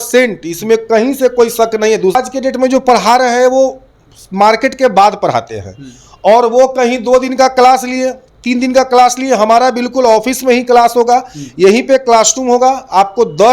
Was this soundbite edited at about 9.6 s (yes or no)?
no